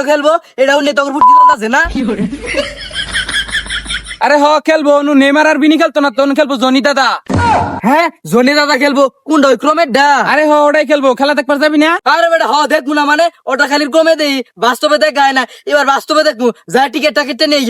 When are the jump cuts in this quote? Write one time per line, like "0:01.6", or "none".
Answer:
none